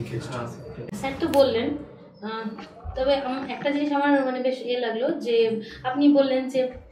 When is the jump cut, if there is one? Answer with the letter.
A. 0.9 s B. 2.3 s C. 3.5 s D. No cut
A